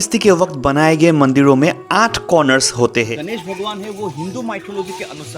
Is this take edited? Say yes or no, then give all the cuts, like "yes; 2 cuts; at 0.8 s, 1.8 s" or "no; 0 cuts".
yes; 1 cut; at 3.2 s